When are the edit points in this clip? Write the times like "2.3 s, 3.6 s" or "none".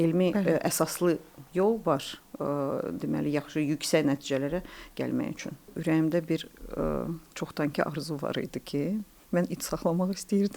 5.8 s